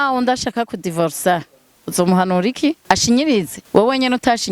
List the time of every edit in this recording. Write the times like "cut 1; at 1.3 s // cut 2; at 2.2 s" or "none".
cut 1; at 2.8 s // cut 2; at 3.6 s